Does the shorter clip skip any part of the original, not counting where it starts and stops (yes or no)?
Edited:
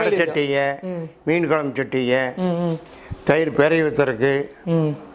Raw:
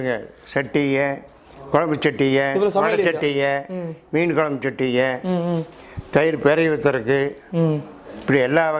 no